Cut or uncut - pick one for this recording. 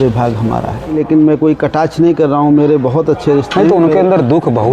cut